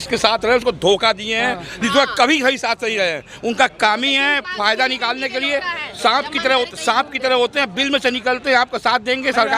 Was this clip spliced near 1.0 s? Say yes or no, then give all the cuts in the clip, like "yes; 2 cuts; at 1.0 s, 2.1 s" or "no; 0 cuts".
no; 0 cuts